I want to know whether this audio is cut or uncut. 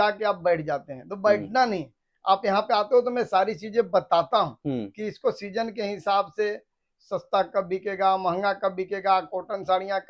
uncut